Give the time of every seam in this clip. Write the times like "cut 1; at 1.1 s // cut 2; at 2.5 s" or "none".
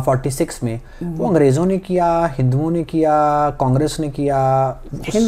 none